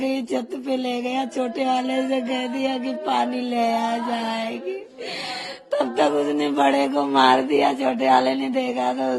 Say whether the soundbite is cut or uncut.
uncut